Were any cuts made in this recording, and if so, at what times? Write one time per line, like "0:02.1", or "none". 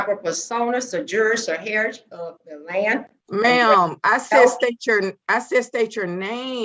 0:03.2